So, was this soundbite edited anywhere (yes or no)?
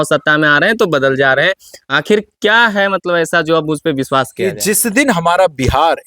yes